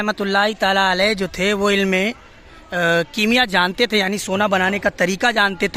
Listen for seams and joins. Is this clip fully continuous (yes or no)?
yes